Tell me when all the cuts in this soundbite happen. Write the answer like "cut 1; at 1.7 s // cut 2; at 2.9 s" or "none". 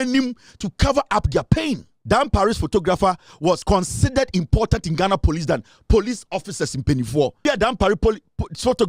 cut 1; at 1.9 s // cut 2; at 3.6 s // cut 3; at 7.4 s